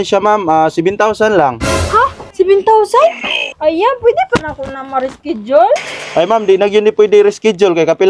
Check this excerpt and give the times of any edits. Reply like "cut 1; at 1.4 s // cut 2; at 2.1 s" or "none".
cut 1; at 3.4 s